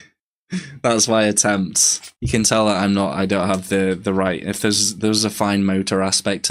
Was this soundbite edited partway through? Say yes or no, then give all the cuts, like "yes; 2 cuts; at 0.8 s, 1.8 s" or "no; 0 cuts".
no; 0 cuts